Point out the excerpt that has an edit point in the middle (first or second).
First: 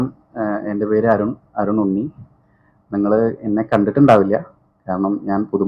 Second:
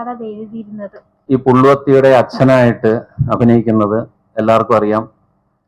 second